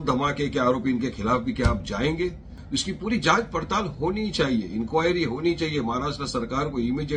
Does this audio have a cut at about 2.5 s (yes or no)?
yes